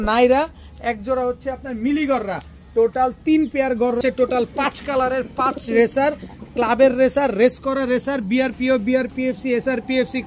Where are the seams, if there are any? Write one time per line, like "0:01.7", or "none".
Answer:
0:04.0